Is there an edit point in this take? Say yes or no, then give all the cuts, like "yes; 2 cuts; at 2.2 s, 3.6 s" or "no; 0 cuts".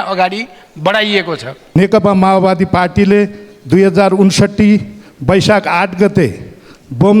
yes; 1 cut; at 1.6 s